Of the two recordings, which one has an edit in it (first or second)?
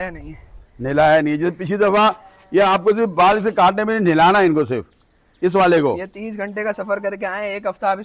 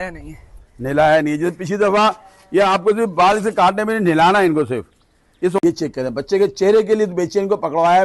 second